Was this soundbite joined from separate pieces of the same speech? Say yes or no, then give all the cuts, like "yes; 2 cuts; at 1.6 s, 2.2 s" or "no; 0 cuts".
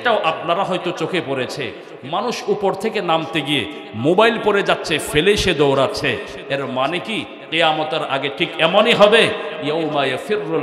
no; 0 cuts